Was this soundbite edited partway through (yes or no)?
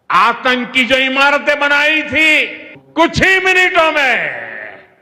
yes